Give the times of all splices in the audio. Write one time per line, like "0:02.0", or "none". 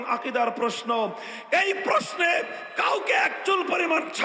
none